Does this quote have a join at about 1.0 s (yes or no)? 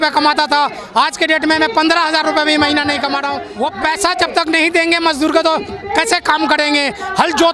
no